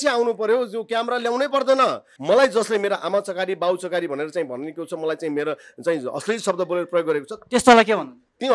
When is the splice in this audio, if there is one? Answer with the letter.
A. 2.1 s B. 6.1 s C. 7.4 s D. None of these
A